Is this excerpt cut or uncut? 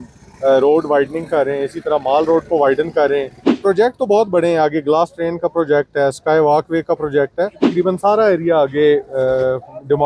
cut